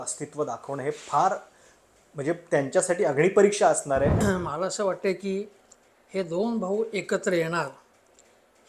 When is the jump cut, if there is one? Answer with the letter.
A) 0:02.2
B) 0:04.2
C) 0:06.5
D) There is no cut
B